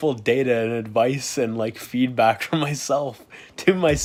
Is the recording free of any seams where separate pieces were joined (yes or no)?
yes